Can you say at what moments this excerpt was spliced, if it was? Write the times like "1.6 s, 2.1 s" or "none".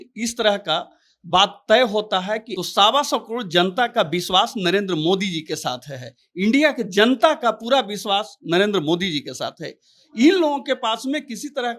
2.5 s